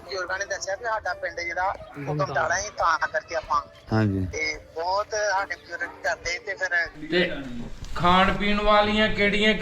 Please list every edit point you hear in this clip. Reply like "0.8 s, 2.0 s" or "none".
6.9 s